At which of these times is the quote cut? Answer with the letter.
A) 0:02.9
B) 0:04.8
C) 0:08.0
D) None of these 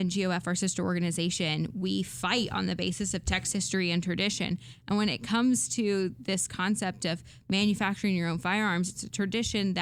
D